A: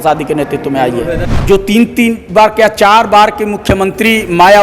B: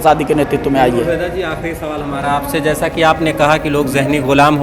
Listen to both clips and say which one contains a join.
A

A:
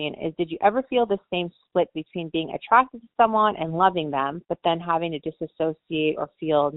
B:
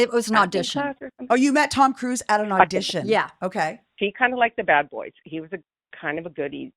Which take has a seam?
B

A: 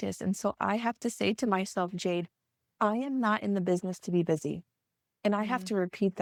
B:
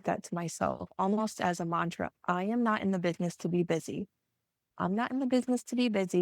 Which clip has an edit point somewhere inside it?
B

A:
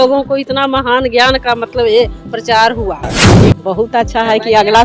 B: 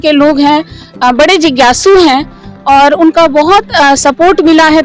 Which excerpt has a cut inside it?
A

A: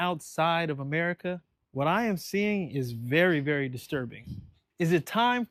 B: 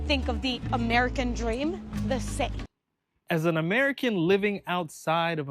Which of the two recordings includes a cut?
B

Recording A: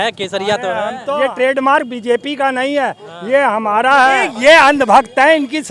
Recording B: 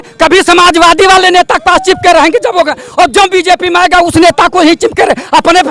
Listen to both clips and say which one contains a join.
A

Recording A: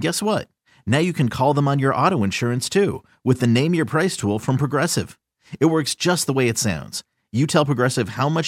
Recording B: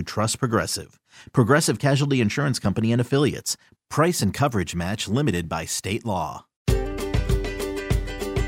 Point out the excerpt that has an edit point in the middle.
B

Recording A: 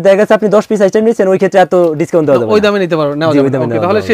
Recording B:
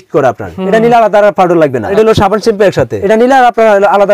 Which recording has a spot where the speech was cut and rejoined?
B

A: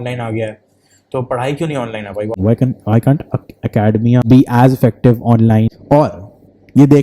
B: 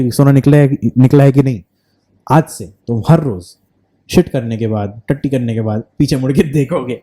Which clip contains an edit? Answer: A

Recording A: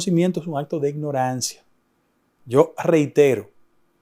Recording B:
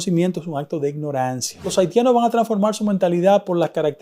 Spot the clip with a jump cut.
B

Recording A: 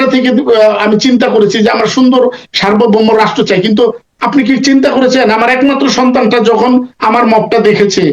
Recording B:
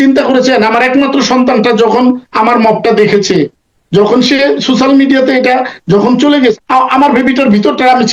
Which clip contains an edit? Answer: B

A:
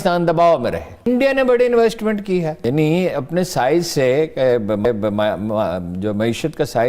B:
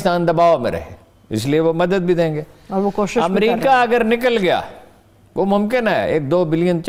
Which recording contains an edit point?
A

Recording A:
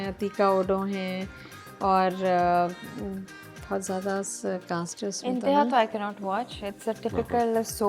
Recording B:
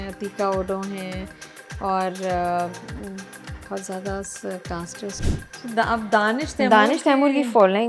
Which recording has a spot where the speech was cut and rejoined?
B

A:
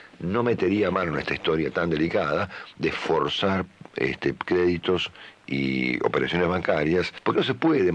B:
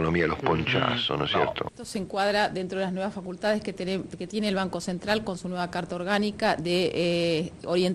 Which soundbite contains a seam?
B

